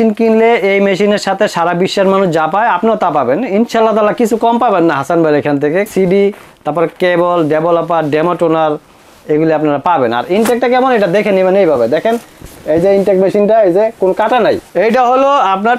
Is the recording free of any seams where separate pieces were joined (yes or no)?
no